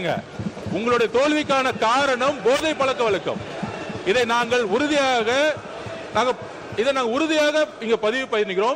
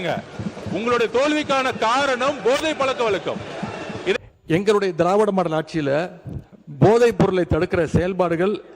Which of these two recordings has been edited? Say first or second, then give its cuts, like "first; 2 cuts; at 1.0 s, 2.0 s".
second; 1 cut; at 4.2 s